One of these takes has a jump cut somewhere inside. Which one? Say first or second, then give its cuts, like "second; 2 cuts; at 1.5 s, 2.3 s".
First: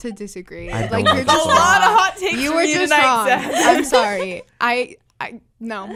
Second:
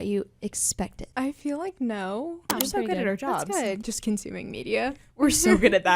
second; 3 cuts; at 1.0 s, 2.5 s, 3.8 s